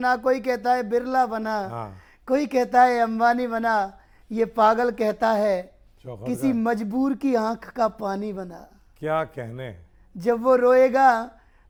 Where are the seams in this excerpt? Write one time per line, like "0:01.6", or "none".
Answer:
none